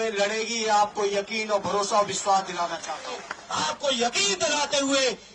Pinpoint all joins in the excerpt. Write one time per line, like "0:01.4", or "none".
0:03.4